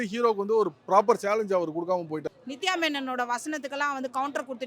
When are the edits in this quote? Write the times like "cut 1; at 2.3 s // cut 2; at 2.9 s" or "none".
cut 1; at 2.2 s